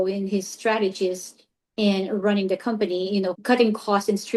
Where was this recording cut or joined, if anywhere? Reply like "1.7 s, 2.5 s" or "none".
3.4 s